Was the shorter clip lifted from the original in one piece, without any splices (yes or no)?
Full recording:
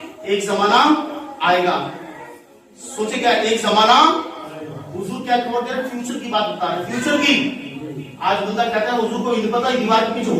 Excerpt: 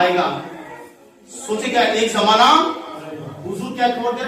yes